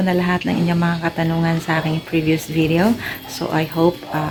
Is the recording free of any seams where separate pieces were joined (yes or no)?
yes